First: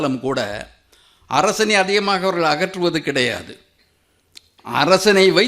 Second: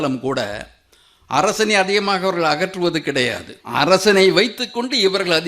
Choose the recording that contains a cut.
second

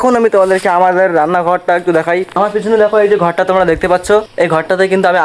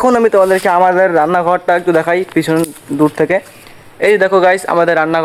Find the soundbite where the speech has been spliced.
first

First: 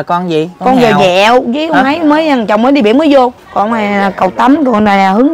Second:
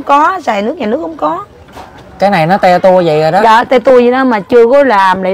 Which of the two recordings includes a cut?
first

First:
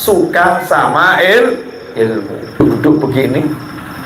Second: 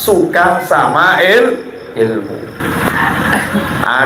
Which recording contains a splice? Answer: first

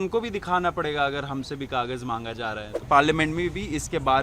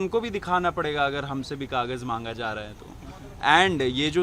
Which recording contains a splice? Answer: first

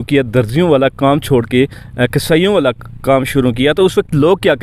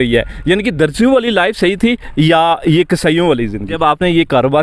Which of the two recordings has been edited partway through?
second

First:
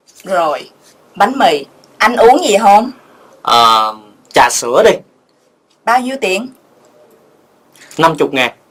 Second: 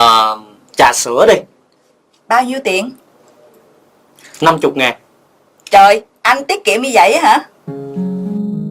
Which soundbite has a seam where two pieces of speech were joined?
second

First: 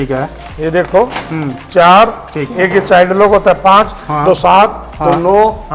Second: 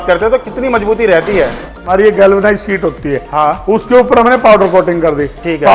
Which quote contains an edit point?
second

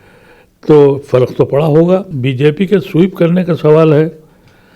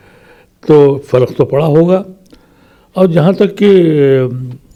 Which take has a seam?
first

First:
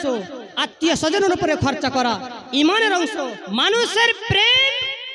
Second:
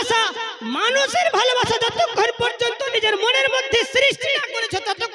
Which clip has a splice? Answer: first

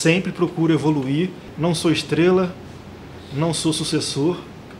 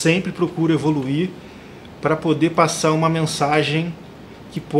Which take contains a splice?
first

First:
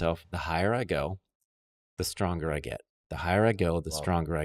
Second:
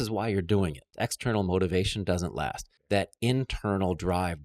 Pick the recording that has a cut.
second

